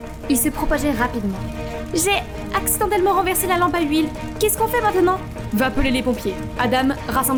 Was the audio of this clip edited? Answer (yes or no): no